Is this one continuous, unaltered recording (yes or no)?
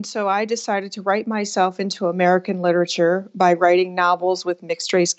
yes